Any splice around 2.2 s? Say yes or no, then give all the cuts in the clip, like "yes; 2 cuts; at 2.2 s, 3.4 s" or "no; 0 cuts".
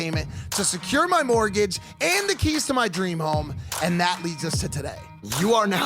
yes; 1 cut; at 2.2 s